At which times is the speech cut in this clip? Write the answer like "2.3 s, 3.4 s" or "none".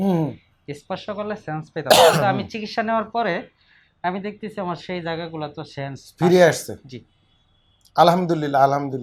none